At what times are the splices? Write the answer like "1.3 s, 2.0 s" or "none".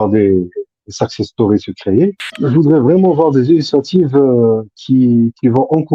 2.3 s